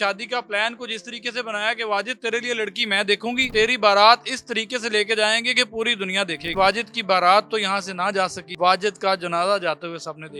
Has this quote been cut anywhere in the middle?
yes; 3 cuts; at 3.4 s, 6.5 s, 8.4 s

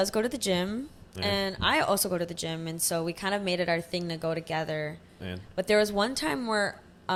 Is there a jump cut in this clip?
no; 0 cuts

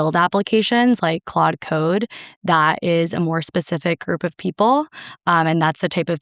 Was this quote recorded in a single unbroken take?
yes; 0 cuts

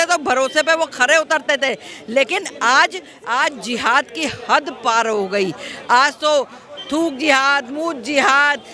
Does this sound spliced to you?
no; 0 cuts

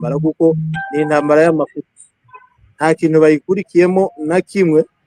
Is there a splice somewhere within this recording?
no; 0 cuts

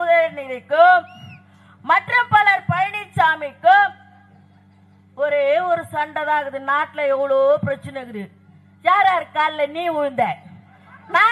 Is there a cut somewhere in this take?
no; 0 cuts

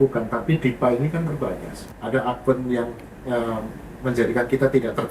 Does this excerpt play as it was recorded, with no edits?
no; 1 cut; at 1.8 s

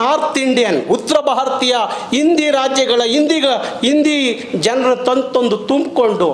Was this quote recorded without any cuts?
yes; 0 cuts

